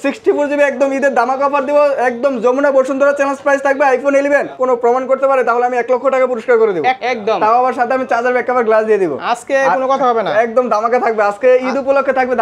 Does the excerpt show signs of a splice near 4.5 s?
yes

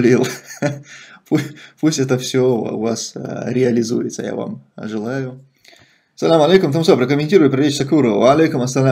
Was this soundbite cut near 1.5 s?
no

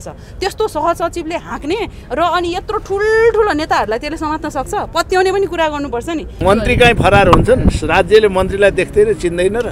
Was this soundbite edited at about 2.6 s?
no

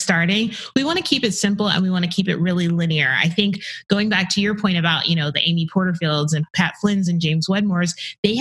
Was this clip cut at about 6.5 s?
yes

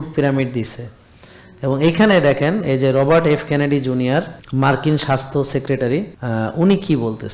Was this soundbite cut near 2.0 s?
no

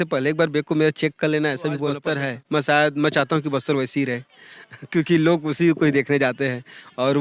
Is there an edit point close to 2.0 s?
yes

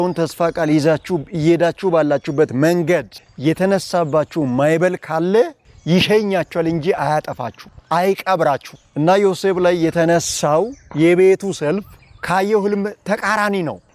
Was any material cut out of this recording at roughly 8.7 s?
no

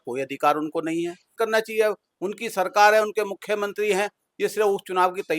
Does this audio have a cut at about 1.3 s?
yes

